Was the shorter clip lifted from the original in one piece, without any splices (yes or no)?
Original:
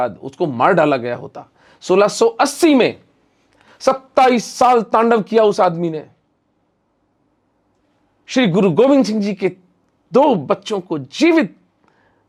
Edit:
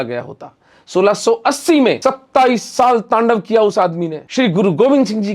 no